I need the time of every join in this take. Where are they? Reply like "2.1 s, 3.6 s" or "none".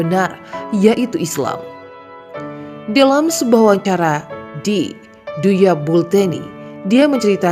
none